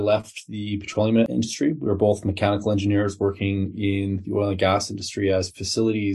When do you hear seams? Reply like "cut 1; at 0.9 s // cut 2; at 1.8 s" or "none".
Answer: cut 1; at 1.3 s